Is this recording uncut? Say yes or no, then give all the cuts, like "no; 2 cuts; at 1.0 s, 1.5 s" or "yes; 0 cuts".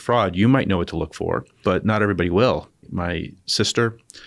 no; 2 cuts; at 1.5 s, 2.8 s